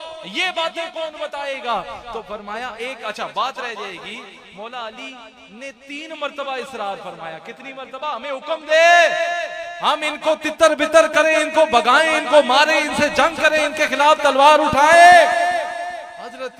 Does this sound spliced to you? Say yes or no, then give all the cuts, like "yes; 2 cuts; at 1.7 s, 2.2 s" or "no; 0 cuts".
no; 0 cuts